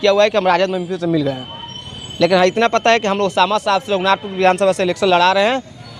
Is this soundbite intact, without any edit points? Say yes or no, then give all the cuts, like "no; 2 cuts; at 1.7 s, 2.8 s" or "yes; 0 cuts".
yes; 0 cuts